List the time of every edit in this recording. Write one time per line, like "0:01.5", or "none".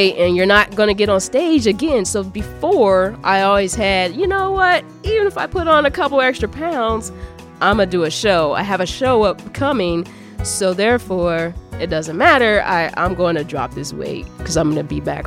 none